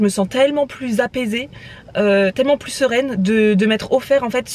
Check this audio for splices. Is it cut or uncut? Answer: uncut